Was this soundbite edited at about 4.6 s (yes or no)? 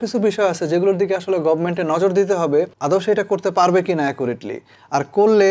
no